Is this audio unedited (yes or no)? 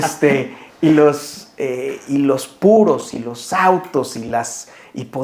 yes